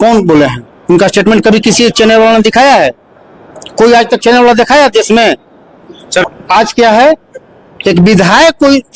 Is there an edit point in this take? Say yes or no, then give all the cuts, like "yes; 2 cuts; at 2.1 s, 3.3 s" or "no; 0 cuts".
yes; 1 cut; at 6.3 s